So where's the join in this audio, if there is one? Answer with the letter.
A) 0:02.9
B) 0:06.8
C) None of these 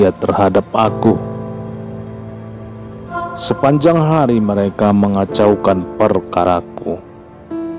B